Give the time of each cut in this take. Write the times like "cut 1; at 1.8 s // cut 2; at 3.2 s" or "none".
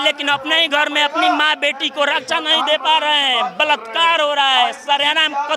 none